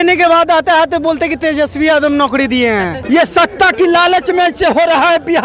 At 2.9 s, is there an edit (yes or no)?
yes